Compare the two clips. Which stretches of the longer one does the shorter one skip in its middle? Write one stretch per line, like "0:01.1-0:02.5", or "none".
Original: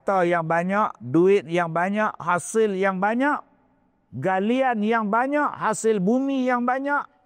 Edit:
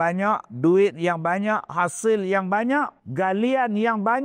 0:03.5-0:04.1